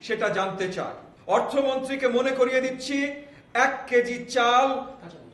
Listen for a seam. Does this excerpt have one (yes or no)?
yes